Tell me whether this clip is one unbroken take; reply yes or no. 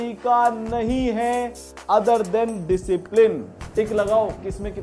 no